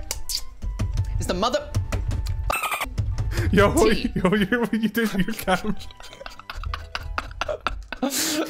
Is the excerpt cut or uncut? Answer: uncut